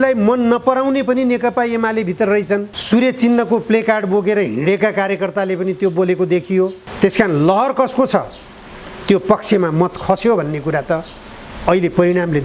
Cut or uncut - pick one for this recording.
cut